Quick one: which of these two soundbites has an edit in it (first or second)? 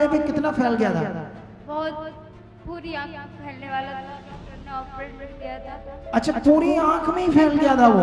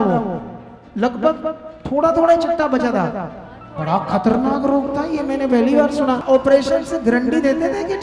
second